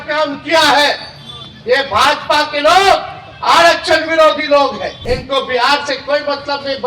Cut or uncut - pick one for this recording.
cut